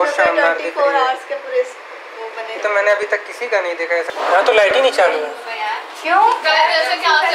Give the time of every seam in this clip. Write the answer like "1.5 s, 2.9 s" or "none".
4.1 s